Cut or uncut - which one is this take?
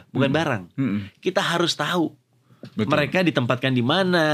uncut